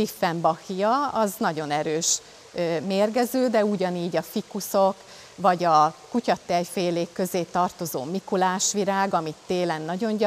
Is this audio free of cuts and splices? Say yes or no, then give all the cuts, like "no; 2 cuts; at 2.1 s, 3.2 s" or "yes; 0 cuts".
yes; 0 cuts